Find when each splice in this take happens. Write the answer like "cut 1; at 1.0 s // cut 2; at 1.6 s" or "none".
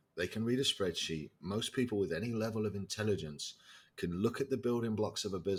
none